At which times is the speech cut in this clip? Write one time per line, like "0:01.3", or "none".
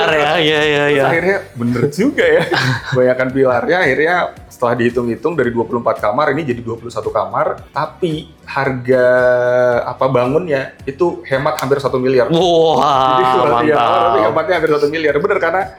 none